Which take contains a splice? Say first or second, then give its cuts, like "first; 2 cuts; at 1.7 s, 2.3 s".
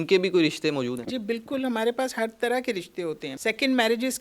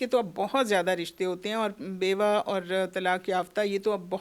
first; 2 cuts; at 1.1 s, 3.3 s